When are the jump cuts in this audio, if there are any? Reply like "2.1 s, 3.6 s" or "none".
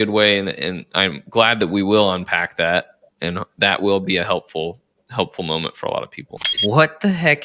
6.3 s